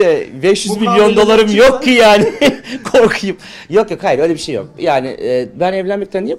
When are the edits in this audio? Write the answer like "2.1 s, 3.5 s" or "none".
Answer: none